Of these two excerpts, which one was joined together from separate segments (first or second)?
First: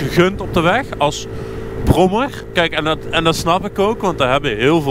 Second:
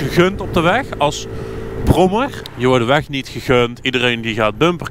second